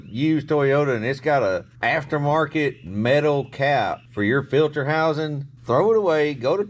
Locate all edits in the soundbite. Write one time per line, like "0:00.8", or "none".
none